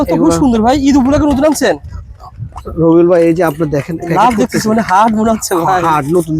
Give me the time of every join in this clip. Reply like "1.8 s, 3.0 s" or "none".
none